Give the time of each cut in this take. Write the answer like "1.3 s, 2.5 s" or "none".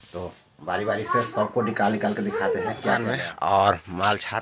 3.2 s